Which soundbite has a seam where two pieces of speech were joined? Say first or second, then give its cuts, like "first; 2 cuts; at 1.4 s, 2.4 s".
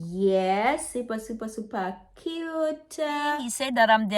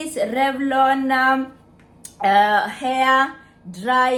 first; 1 cut; at 3.2 s